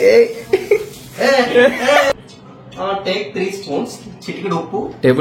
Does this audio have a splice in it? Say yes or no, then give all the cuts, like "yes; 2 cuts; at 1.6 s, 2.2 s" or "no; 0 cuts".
yes; 1 cut; at 2.1 s